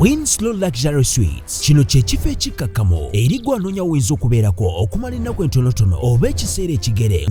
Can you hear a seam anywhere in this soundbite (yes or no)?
no